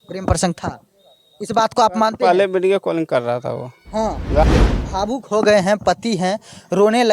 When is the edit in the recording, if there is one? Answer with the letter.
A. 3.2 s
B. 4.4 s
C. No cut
B